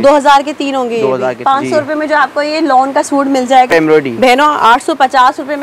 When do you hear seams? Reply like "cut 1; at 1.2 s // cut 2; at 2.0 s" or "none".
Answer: cut 1; at 1.4 s // cut 2; at 3.7 s